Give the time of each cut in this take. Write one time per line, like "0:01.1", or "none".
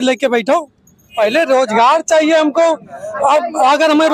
0:01.1